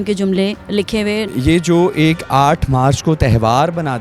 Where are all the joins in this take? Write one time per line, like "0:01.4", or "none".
0:01.3